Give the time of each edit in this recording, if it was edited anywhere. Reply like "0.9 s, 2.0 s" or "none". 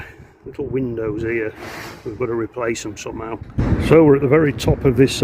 3.4 s